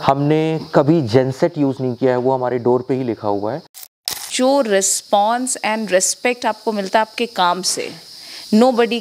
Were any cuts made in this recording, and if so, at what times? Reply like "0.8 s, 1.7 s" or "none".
4.2 s